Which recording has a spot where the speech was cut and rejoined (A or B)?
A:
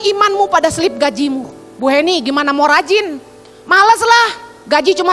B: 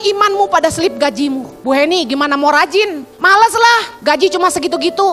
B